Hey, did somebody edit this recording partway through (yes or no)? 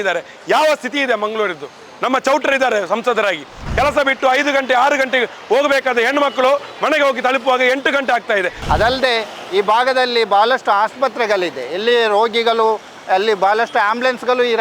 yes